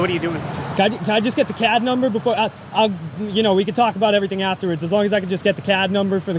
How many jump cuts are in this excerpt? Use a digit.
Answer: 0